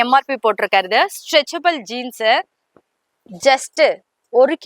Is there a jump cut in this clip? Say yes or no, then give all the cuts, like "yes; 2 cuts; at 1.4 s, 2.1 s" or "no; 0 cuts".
no; 0 cuts